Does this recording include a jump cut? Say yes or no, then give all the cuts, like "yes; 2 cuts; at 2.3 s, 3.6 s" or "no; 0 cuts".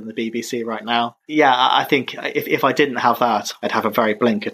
no; 0 cuts